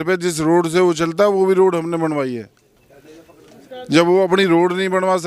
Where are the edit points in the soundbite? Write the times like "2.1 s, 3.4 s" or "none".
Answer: none